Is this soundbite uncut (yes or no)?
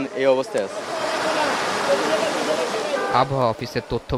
yes